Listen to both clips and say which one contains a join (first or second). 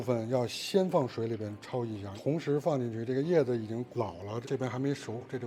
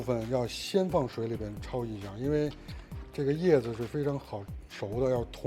first